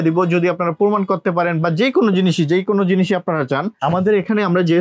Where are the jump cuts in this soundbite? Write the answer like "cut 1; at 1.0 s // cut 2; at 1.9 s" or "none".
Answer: cut 1; at 3.8 s